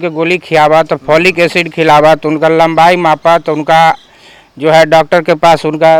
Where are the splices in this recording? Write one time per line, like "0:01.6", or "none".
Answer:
none